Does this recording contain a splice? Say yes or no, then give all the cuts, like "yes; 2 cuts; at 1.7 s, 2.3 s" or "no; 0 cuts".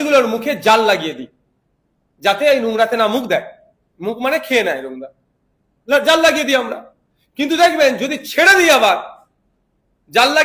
no; 0 cuts